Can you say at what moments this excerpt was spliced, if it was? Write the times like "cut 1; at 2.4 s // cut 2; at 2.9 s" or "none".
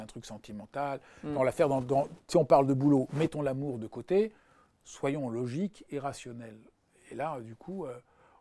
none